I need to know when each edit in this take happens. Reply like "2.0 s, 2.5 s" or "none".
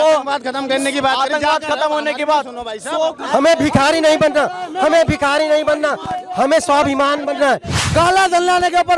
7.8 s